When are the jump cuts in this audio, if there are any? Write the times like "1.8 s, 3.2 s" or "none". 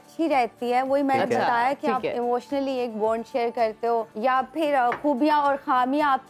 4.1 s